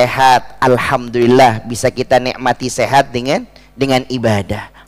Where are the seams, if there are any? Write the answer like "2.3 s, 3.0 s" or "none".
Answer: none